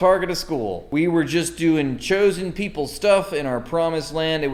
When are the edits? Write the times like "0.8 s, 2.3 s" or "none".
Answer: none

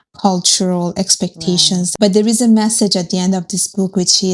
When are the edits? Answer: 1.9 s

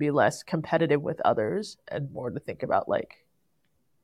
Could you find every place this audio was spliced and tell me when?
none

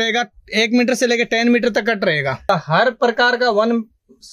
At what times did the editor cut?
2.5 s

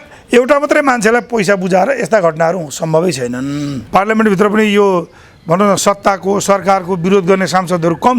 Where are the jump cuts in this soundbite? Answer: 3.8 s

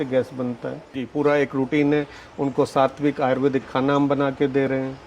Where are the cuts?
1.0 s

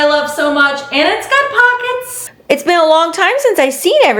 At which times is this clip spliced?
2.3 s

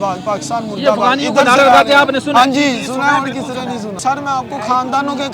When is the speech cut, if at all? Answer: none

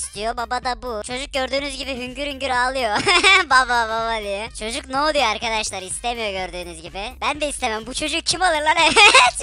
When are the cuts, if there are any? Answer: 1.1 s, 4.5 s

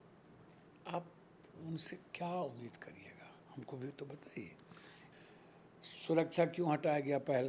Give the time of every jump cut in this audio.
5.0 s

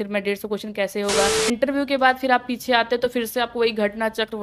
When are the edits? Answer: 1.5 s

